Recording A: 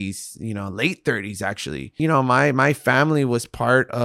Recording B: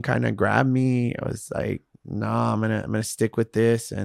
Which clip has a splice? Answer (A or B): A